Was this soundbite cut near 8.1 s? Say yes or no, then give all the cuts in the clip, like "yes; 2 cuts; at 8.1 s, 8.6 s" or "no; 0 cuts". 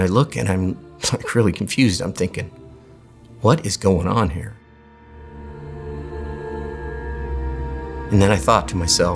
yes; 1 cut; at 8.1 s